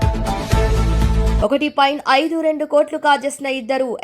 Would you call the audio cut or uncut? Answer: cut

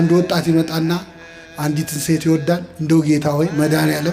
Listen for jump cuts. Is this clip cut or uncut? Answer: uncut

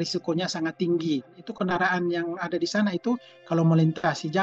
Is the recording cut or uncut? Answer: cut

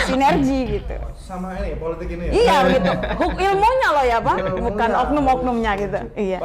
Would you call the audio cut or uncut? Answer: uncut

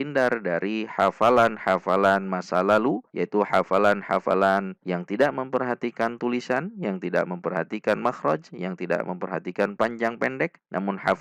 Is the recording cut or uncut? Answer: uncut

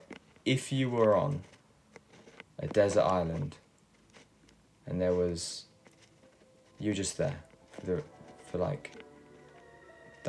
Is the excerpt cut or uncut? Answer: uncut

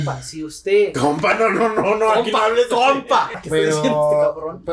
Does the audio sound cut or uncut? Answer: cut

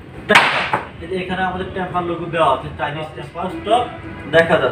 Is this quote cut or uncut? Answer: cut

